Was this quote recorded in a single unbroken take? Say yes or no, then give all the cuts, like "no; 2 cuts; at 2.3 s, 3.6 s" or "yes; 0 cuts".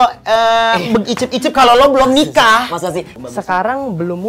no; 1 cut; at 3.1 s